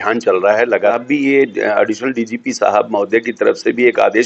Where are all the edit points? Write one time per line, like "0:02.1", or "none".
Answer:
0:00.9